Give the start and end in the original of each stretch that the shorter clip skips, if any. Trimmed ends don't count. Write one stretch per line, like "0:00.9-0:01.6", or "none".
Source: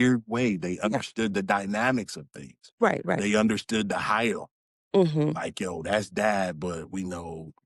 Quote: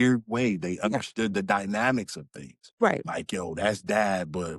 0:03.0-0:05.3